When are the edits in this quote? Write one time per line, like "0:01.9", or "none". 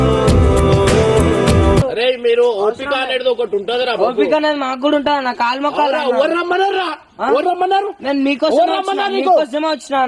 0:01.8